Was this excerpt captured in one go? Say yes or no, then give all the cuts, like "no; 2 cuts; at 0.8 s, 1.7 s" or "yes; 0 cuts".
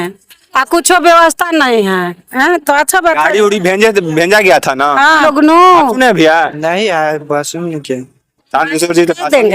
no; 1 cut; at 5.2 s